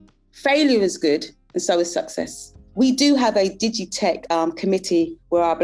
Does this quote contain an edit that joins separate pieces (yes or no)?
yes